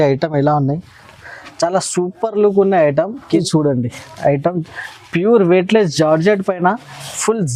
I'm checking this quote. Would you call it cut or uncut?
cut